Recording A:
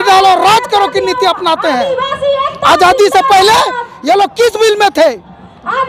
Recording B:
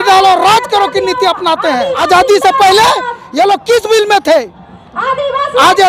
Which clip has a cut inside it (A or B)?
B